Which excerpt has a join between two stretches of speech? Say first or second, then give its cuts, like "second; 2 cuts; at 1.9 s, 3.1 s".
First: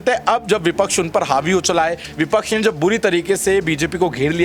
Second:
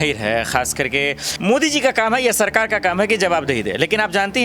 second; 1 cut; at 1.2 s